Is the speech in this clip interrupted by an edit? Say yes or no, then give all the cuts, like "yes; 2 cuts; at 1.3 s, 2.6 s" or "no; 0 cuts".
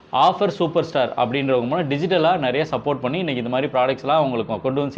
no; 0 cuts